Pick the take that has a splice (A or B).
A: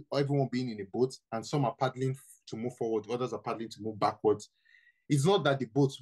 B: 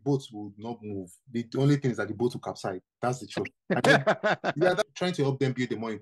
B